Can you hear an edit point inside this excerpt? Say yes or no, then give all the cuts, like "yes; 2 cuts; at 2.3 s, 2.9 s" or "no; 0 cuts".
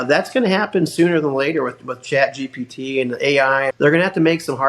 yes; 1 cut; at 3.7 s